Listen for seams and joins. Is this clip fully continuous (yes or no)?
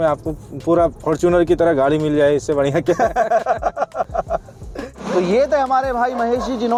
yes